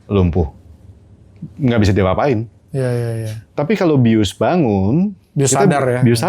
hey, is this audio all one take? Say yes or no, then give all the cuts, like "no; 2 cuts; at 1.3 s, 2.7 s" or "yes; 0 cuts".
no; 1 cut; at 3.4 s